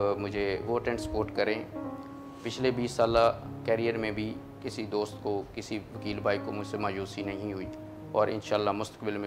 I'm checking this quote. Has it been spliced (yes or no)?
no